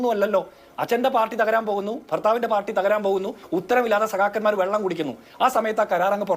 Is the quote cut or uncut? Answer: cut